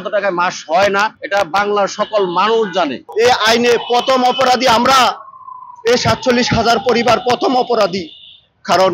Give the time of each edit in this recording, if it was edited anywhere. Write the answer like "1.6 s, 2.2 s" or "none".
1.2 s, 3.0 s

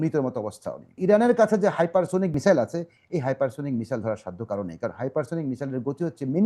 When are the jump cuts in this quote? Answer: 1.0 s, 2.3 s

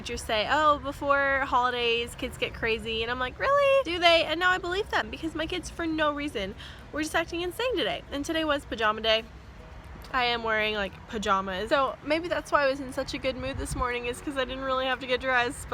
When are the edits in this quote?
none

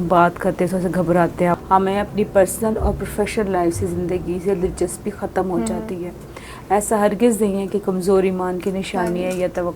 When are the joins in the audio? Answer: 1.6 s

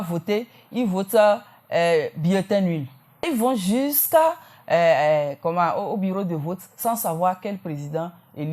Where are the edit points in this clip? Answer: 3.3 s

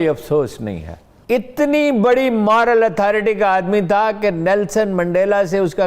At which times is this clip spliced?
1.2 s

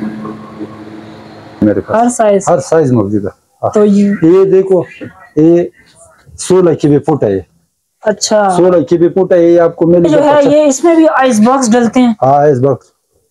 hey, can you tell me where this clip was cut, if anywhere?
1.6 s, 10.1 s

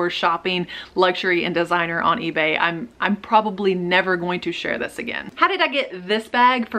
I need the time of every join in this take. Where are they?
5.3 s

